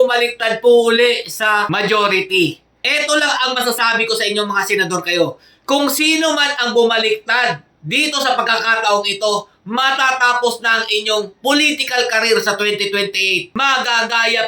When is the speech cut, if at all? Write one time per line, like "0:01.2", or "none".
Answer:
0:01.7
0:02.7
0:13.5